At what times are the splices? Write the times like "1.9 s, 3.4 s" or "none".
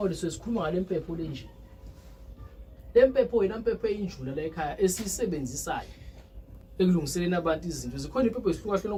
none